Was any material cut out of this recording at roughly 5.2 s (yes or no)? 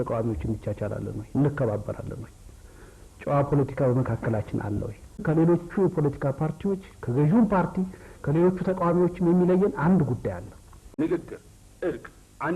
yes